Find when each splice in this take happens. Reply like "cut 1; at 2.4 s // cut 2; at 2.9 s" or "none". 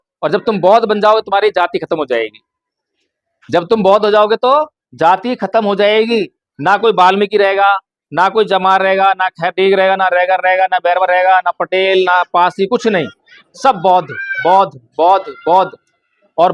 none